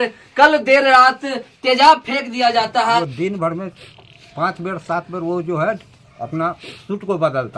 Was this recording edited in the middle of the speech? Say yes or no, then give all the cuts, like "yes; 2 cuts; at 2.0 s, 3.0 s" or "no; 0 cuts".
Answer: yes; 1 cut; at 3.0 s